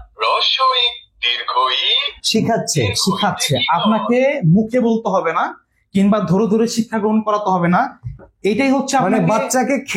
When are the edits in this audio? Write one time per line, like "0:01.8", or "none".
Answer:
none